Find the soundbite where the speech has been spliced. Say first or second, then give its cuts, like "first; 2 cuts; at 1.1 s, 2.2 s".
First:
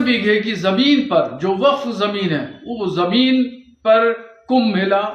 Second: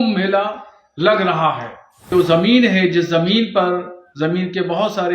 second; 1 cut; at 2.1 s